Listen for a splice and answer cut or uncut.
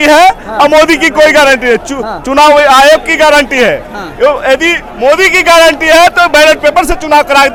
uncut